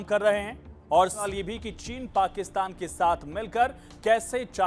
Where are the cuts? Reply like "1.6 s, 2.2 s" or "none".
1.0 s